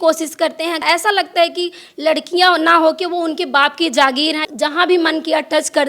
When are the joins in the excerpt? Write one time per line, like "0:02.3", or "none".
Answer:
0:00.8
0:04.4